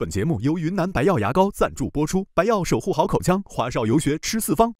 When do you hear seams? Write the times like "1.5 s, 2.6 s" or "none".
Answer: none